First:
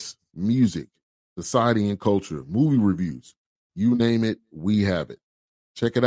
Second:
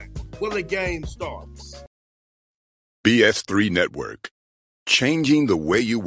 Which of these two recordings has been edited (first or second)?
second